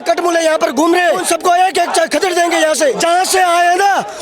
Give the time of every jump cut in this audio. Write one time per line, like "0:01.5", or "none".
0:01.2
0:03.0